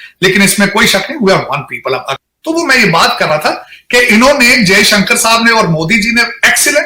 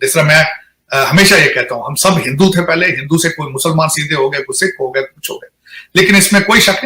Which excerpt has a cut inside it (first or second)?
first